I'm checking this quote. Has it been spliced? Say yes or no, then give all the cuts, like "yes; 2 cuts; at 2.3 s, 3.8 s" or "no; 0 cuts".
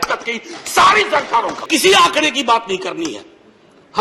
yes; 1 cut; at 1.6 s